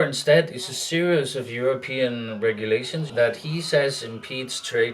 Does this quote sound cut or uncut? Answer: cut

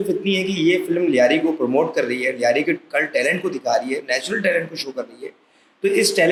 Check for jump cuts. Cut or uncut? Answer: uncut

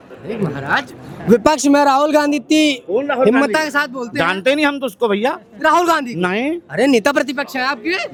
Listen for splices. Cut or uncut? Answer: uncut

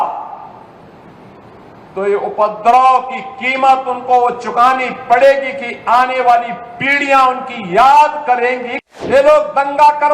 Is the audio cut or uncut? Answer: cut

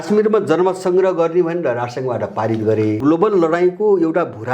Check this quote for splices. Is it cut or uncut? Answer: cut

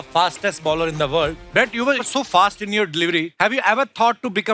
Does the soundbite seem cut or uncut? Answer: cut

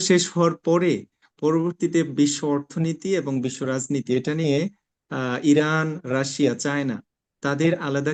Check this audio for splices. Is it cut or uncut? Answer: uncut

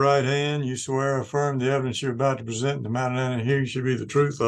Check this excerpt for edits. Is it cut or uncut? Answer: uncut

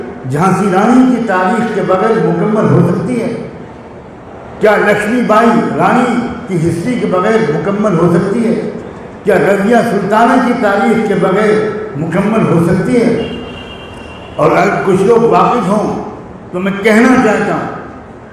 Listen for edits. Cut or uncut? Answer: uncut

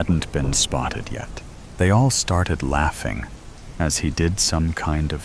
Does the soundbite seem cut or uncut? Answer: cut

